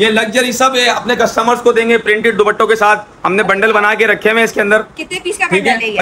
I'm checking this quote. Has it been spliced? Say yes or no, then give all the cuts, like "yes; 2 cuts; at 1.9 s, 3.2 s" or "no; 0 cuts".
no; 0 cuts